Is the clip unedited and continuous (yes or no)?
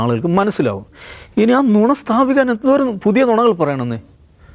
yes